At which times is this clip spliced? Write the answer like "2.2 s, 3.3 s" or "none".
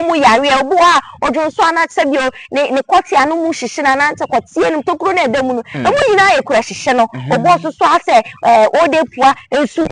none